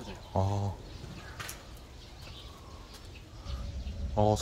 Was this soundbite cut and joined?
no; 0 cuts

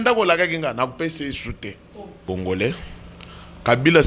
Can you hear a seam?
yes; 1 cut; at 2.2 s

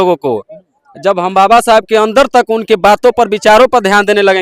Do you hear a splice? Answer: no; 0 cuts

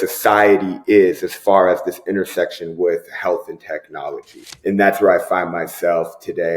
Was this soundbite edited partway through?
yes; 1 cut; at 4.4 s

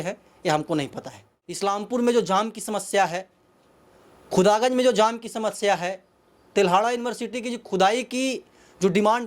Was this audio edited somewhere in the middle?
yes; 1 cut; at 1.6 s

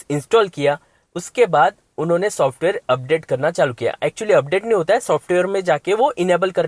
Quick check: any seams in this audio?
no; 0 cuts

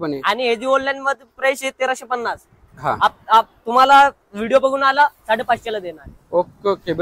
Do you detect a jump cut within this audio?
no; 0 cuts

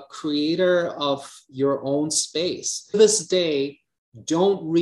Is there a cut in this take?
yes; 1 cut; at 3.0 s

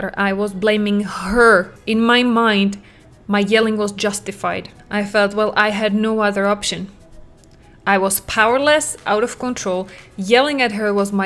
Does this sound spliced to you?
yes; 2 cuts; at 1.8 s, 4.7 s

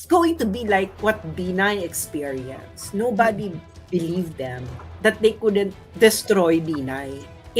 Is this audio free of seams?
no; 1 cut; at 0.9 s

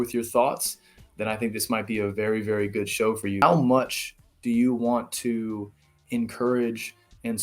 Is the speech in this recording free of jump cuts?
no; 1 cut; at 3.4 s

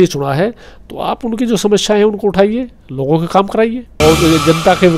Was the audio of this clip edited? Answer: yes; 1 cut; at 3.9 s

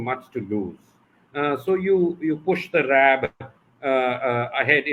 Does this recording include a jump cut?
no; 0 cuts

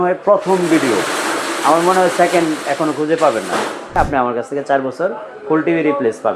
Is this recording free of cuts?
no; 1 cut; at 4.0 s

